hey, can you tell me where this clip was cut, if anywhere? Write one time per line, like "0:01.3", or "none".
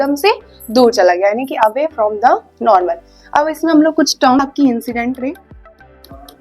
0:04.4